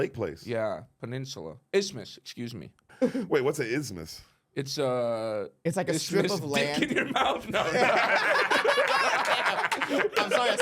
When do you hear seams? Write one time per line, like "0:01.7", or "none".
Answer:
0:02.8